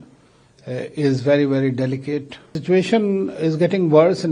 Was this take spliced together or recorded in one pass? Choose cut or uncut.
cut